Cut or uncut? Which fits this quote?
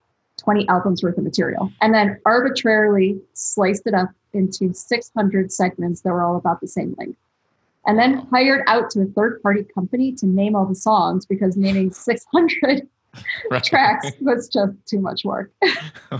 cut